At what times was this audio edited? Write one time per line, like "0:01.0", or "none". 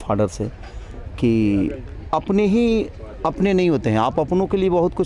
none